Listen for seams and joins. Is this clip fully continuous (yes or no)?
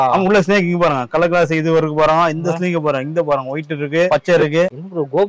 yes